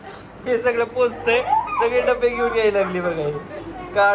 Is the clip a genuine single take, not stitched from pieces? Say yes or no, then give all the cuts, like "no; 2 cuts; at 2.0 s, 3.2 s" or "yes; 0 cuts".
yes; 0 cuts